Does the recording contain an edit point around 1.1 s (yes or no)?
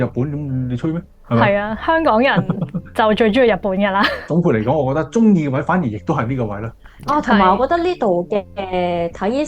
no